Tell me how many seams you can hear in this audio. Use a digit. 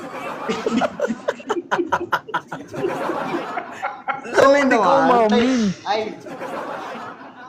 0